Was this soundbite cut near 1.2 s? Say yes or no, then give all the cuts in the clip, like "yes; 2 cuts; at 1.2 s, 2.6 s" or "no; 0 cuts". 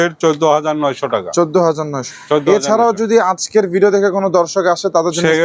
no; 0 cuts